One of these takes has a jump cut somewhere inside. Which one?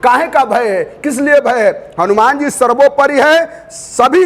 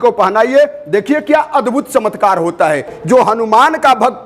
second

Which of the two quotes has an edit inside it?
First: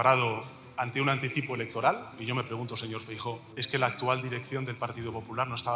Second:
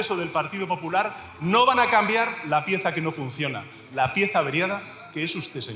first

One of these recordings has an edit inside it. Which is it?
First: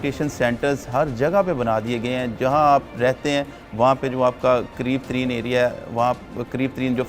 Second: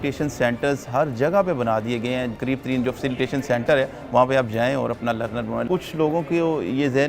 second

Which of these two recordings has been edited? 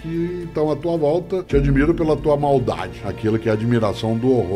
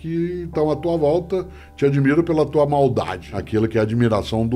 first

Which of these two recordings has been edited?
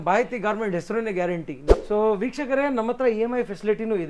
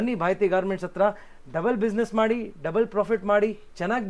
first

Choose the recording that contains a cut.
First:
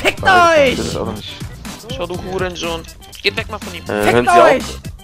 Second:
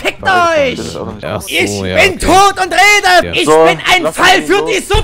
second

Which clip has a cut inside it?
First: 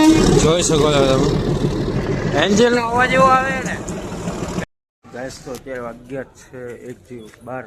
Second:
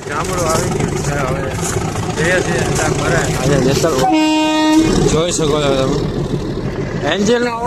first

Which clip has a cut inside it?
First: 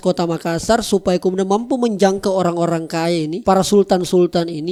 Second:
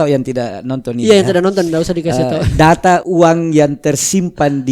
second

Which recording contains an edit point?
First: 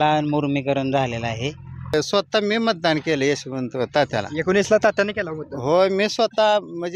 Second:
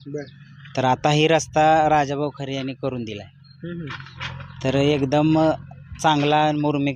first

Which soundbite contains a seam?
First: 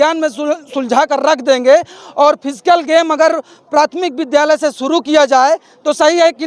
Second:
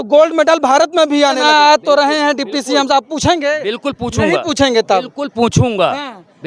second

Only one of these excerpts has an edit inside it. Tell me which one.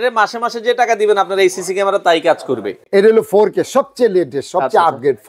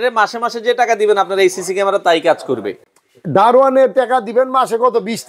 first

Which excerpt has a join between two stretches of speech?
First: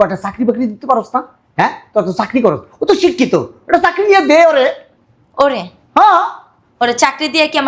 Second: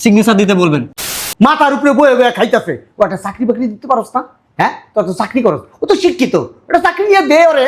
second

